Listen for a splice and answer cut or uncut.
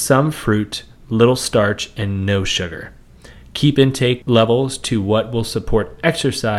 cut